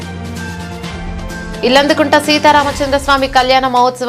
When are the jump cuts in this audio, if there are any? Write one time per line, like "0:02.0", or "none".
0:01.2